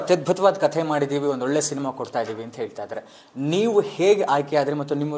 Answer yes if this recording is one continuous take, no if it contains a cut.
yes